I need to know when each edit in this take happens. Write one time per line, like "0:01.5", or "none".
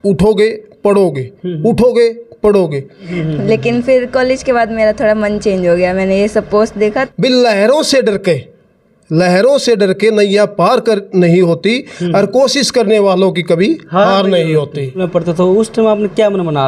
0:03.2
0:07.0
0:15.1